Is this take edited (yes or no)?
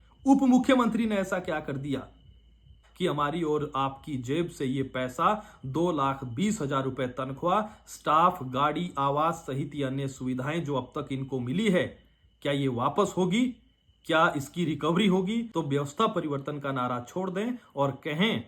yes